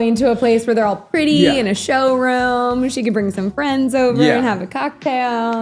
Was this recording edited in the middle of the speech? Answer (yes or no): no